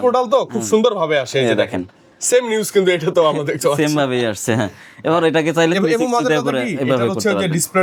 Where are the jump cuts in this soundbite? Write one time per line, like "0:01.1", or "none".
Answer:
none